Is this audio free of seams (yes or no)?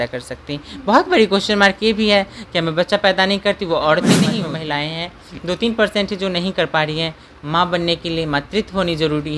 no